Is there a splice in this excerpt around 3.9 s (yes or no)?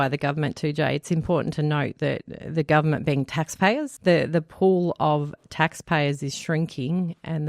yes